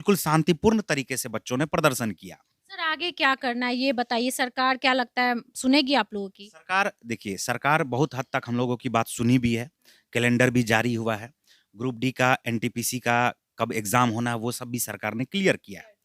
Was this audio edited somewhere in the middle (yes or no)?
no